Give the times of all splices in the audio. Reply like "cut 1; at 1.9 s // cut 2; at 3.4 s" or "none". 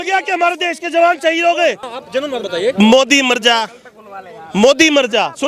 cut 1; at 1.9 s